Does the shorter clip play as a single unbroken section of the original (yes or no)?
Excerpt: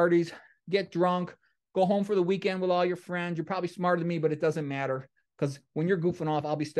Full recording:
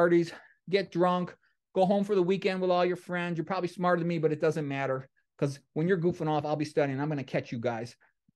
yes